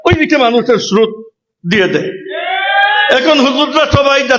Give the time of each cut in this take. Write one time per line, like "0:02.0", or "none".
none